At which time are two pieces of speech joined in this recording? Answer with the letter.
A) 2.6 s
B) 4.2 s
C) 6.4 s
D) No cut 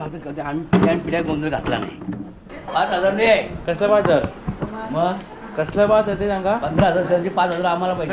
A